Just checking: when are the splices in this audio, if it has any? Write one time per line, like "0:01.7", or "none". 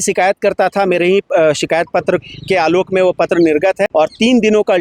0:03.8